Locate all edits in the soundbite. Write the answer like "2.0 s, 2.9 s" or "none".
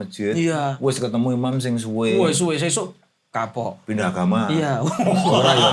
none